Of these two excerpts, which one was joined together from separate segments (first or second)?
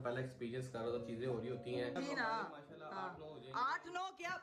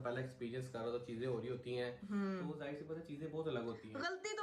first